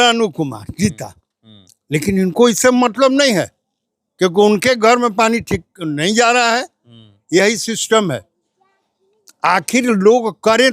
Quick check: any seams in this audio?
no; 0 cuts

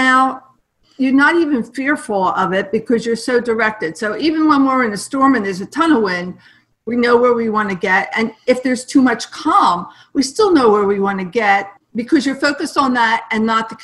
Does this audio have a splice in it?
yes; 1 cut; at 11.7 s

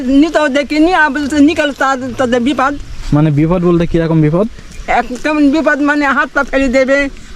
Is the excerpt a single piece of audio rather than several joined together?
yes; 0 cuts

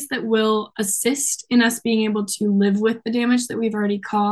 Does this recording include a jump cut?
no; 0 cuts

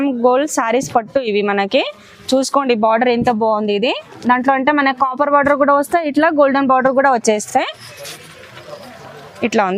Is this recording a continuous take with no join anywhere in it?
yes; 0 cuts

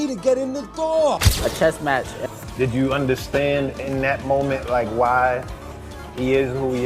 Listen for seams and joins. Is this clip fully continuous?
no; 1 cut; at 1.3 s

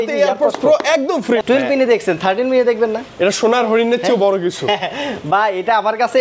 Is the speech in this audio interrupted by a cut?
yes; 1 cut; at 1.4 s

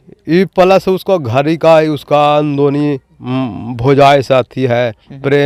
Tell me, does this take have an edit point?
no; 0 cuts

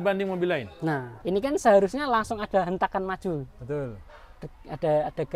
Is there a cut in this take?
yes; 1 cut; at 1.1 s

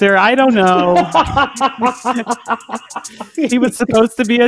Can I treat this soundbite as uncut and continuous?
no; 1 cut; at 3.3 s

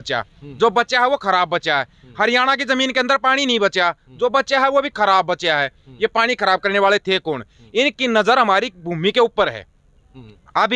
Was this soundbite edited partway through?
no; 0 cuts

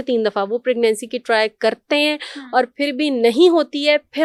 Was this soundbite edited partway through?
no; 0 cuts

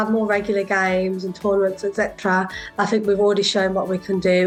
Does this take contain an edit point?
no; 0 cuts

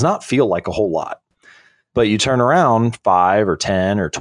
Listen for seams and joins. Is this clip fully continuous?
no; 1 cut; at 1.2 s

